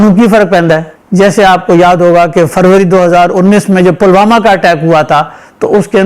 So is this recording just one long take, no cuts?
no; 1 cut; at 1.0 s

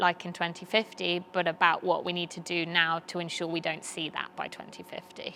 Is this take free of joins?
yes; 0 cuts

